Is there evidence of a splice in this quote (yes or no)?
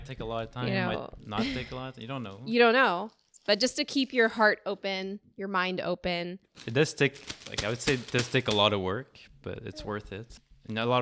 yes